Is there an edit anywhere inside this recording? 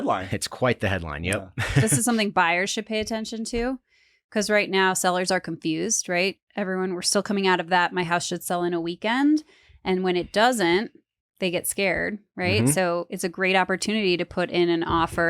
yes; 1 cut; at 1.8 s

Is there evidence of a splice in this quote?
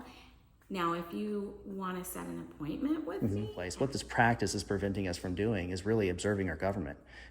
yes; 1 cut; at 3.6 s

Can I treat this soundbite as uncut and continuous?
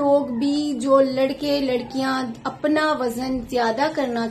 yes; 0 cuts

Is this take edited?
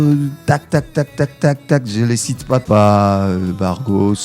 yes; 1 cut; at 2.6 s

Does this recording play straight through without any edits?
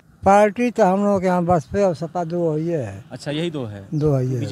yes; 0 cuts

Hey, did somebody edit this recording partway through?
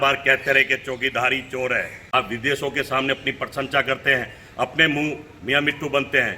yes; 2 cuts; at 2.0 s, 5.3 s

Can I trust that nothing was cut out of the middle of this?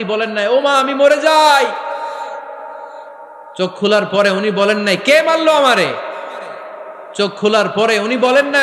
yes; 0 cuts

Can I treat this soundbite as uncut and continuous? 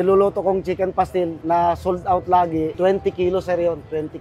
yes; 0 cuts

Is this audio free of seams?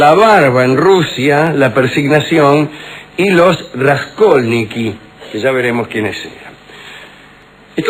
yes; 0 cuts

